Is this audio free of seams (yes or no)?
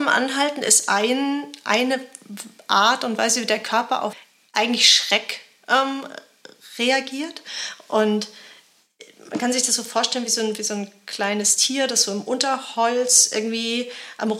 no